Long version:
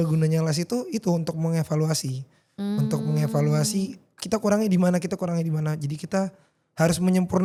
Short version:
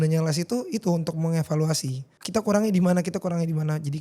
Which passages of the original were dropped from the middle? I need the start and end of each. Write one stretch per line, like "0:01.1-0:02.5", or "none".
0:02.3-0:04.1